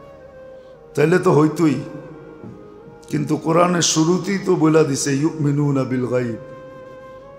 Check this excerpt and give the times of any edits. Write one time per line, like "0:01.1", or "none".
none